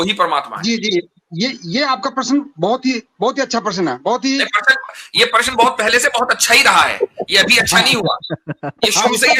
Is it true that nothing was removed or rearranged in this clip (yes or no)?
yes